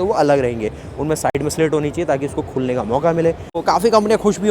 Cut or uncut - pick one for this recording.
cut